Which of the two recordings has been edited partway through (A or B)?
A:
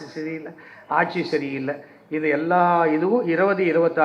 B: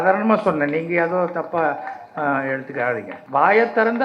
B